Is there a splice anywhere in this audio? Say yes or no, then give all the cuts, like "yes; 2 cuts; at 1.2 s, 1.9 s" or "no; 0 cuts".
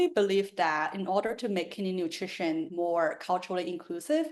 yes; 1 cut; at 2.7 s